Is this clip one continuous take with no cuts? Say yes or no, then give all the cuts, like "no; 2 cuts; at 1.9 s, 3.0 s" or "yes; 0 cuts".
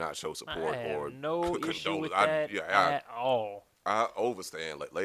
yes; 0 cuts